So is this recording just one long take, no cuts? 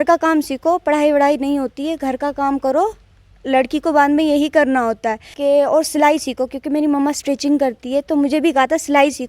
no; 1 cut; at 5.3 s

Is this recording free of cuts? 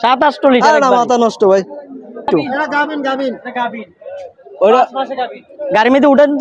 no; 1 cut; at 2.3 s

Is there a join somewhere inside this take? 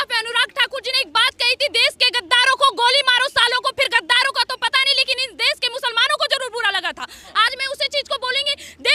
no; 0 cuts

